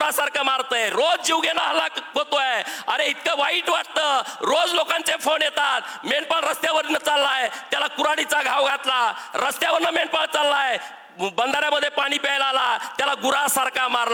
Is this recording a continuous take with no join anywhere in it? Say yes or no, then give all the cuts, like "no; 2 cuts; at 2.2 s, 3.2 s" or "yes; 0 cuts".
yes; 0 cuts